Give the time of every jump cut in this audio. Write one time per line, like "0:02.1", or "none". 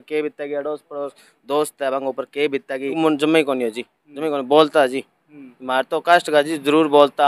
0:02.9